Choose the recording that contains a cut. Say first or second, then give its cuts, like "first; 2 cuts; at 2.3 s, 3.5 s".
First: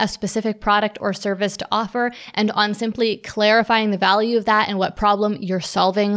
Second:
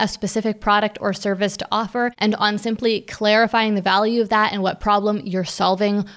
second; 1 cut; at 2.2 s